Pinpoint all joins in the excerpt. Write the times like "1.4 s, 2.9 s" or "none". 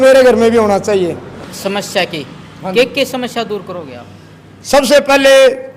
1.4 s